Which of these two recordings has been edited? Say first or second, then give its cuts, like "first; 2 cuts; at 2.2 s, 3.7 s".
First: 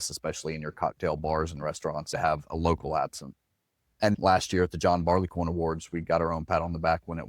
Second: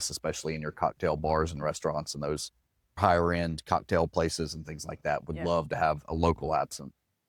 first; 2 cuts; at 2.1 s, 4.0 s